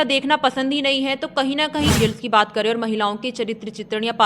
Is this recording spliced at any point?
yes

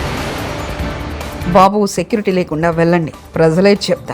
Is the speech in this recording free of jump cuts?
no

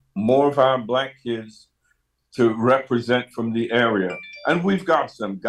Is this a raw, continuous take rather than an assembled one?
yes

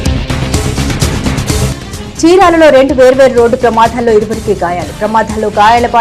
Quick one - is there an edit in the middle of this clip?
yes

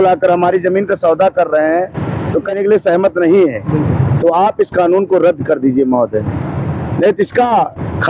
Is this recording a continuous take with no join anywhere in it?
no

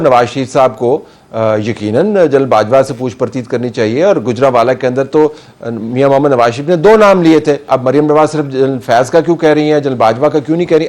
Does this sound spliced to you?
yes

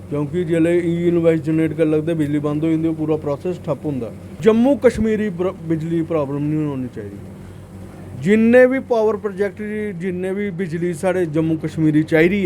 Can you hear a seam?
yes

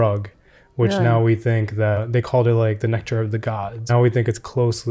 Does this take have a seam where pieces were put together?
yes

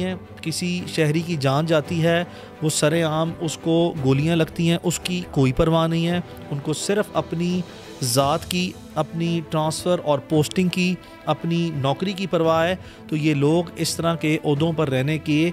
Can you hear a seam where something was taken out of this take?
no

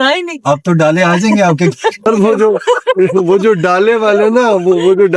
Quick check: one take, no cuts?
no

